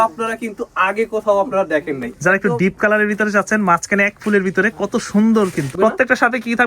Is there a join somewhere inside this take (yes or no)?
yes